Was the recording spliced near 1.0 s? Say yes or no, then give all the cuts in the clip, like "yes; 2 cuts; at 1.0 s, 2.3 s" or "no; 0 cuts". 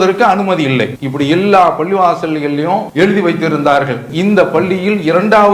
yes; 3 cuts; at 1.0 s, 2.9 s, 4.1 s